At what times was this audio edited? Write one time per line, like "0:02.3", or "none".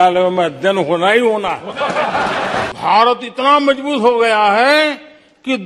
0:02.7